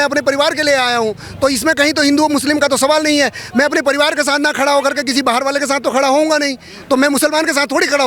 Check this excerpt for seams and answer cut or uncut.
uncut